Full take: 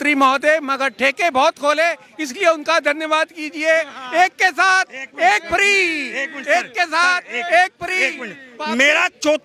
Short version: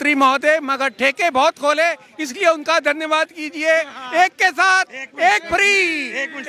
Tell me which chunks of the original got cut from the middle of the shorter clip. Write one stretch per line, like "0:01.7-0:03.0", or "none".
none